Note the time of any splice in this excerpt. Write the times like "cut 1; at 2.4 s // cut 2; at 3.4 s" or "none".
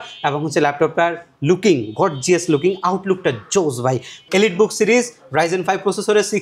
cut 1; at 4.1 s